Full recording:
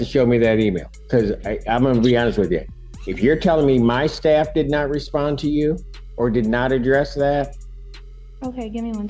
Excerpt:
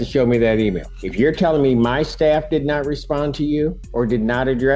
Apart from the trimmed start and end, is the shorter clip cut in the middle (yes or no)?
yes